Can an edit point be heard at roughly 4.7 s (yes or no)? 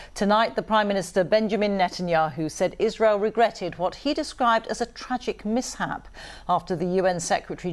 yes